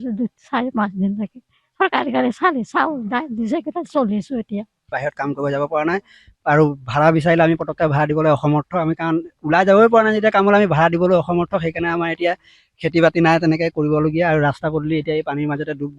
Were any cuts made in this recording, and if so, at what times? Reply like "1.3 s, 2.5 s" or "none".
4.9 s